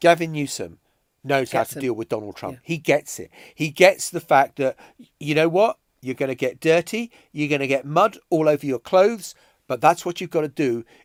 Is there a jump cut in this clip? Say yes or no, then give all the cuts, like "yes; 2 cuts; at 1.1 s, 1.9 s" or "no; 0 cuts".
no; 0 cuts